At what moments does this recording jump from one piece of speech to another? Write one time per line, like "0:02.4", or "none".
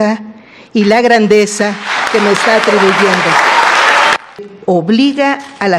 0:04.5